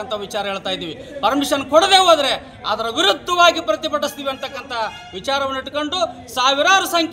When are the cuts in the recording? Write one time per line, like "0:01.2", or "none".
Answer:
none